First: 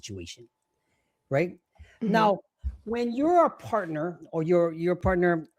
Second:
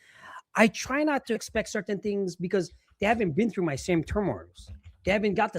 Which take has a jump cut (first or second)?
second